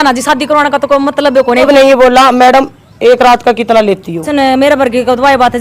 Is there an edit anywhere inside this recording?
yes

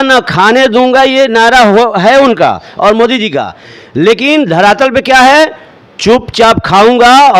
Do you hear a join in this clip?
no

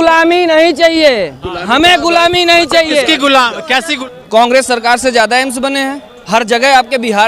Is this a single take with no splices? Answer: no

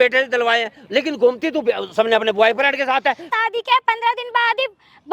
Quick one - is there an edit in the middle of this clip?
yes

